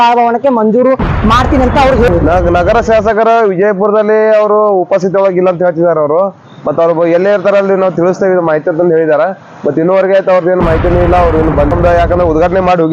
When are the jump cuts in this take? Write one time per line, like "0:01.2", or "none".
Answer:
0:02.1
0:11.7